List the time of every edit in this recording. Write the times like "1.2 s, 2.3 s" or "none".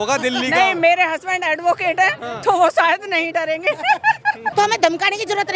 4.4 s